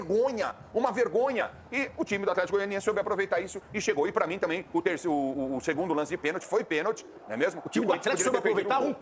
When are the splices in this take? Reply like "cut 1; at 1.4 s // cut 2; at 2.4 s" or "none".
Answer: none